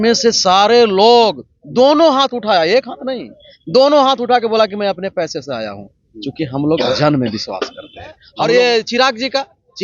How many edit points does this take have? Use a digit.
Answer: 1